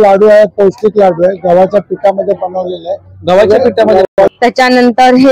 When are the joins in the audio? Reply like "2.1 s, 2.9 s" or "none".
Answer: 4.0 s